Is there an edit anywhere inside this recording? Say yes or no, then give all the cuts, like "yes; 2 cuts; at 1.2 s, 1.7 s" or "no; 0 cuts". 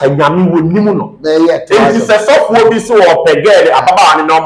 no; 0 cuts